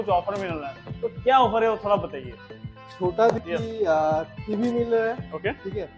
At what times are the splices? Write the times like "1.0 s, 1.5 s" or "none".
3.4 s

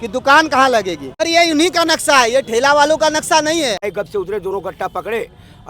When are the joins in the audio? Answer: 1.2 s, 3.8 s

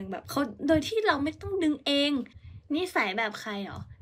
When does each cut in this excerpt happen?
2.4 s

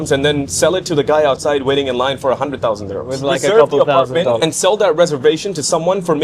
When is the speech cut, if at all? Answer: 3.1 s

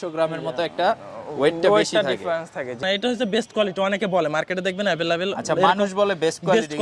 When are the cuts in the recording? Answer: 2.8 s

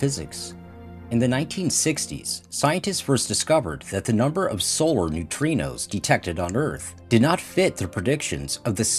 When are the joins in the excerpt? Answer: 3.7 s

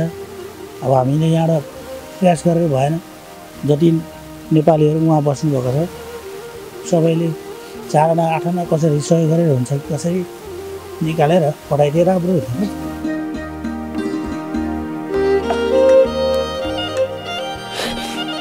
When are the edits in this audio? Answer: 12.8 s

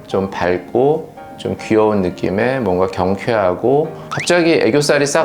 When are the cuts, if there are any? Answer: 4.0 s

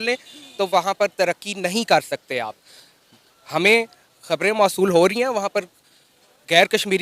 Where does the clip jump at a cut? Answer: none

